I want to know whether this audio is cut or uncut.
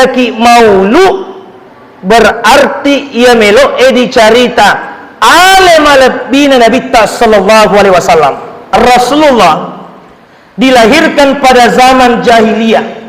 cut